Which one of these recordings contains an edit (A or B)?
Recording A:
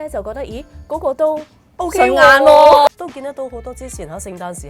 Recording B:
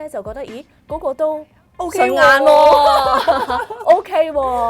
A